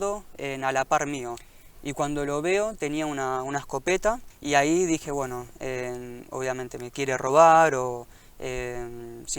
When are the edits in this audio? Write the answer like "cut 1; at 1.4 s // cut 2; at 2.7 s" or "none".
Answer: cut 1; at 1.3 s // cut 2; at 4.3 s